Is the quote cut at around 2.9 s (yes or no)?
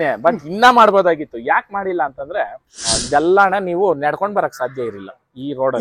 yes